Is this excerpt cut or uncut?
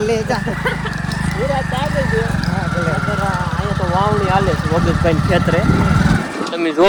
uncut